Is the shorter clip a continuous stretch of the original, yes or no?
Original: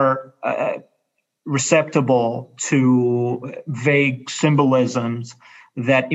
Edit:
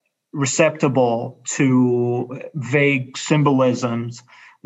yes